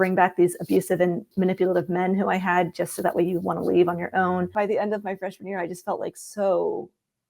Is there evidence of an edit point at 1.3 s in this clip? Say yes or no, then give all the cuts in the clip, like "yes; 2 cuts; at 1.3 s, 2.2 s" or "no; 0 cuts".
yes; 2 cuts; at 1.3 s, 4.5 s